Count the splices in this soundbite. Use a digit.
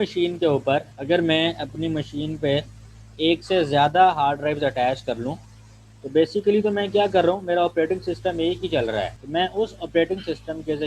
2